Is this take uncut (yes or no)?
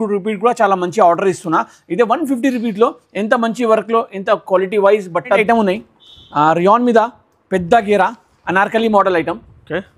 no